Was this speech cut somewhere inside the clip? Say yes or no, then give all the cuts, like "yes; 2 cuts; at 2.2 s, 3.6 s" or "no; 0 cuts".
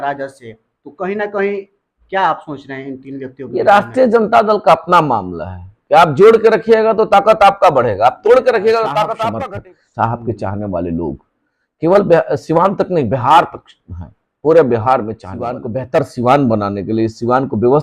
yes; 2 cuts; at 9.2 s, 15.6 s